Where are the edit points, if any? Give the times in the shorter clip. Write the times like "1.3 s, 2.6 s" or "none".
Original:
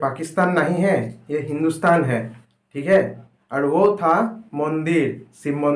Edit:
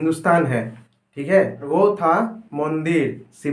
1.7 s